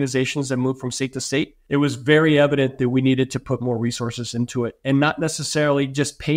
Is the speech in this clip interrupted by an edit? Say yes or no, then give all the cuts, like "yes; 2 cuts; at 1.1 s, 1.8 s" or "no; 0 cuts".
yes; 1 cut; at 1.6 s